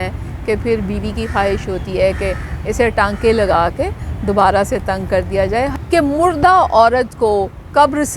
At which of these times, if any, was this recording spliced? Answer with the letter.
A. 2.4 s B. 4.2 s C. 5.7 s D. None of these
C